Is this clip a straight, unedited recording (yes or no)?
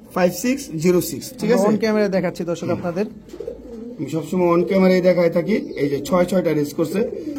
yes